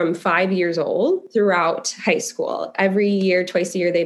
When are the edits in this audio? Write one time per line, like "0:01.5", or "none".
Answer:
0:01.2